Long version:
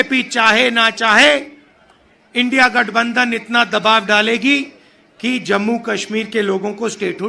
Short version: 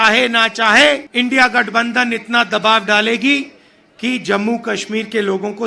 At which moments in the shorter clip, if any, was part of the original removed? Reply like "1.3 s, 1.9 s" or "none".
1.1 s